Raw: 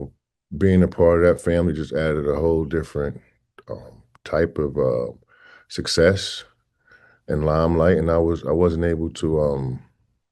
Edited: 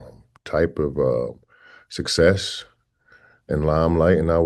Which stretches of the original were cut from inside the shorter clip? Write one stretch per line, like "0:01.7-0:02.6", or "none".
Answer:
none